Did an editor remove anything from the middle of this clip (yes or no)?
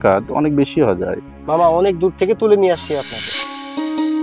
yes